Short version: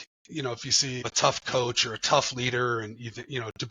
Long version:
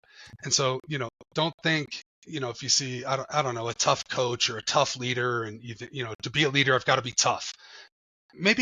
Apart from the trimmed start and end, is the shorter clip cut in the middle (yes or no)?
yes